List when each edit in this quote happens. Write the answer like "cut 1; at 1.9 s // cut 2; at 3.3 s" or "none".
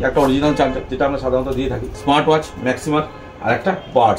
cut 1; at 1.9 s